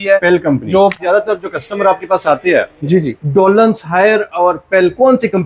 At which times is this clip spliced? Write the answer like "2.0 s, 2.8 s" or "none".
1.0 s